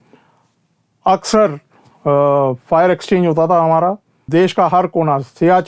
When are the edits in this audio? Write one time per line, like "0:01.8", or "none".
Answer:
0:04.3